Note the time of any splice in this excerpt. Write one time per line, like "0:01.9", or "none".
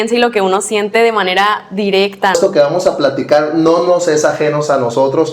0:02.3